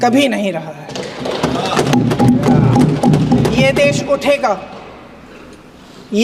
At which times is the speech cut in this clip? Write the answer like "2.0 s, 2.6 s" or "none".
none